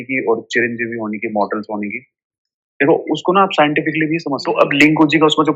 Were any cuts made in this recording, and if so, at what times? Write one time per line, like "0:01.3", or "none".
0:04.5